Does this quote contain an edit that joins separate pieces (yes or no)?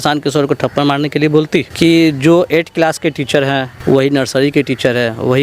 yes